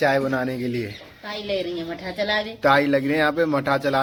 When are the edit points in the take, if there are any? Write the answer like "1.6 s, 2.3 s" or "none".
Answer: none